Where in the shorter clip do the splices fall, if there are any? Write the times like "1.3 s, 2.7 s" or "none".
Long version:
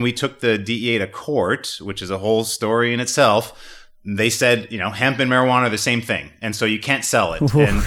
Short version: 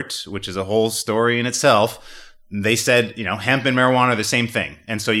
none